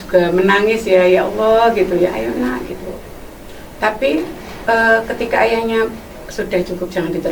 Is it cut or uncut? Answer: uncut